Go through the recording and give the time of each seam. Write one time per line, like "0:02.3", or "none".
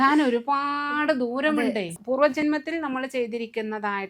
0:02.0